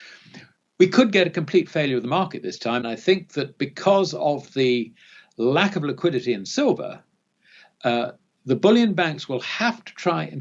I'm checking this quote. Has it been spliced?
yes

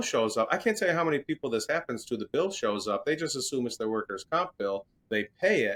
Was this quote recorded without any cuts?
yes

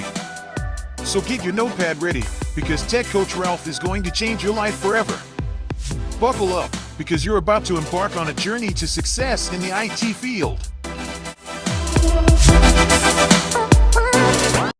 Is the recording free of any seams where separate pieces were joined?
yes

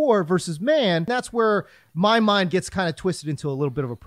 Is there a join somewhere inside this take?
yes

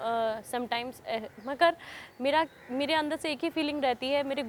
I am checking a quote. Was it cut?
no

